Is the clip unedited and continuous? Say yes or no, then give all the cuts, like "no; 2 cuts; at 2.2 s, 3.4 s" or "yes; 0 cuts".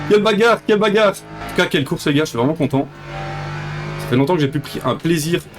no; 1 cut; at 1.3 s